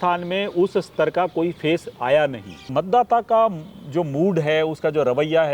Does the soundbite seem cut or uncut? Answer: cut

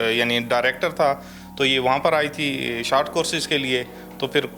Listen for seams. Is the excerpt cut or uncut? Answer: uncut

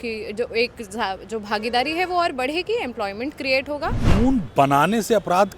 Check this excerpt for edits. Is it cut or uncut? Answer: cut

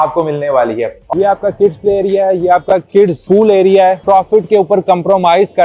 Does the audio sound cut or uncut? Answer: cut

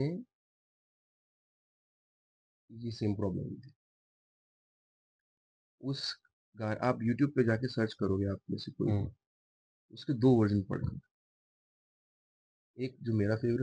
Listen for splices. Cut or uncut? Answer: uncut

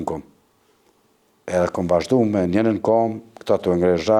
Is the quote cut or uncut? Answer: uncut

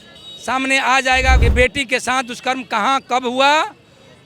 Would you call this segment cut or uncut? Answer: cut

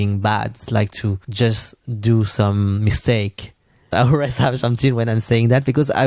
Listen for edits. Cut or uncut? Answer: cut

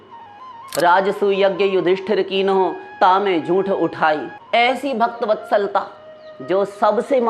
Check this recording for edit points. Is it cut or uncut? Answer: cut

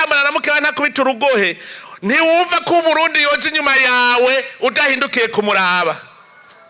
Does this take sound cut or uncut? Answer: uncut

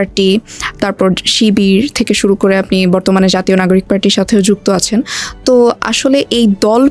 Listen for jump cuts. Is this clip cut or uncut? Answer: uncut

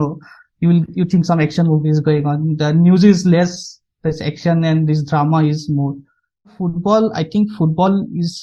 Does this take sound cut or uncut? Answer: cut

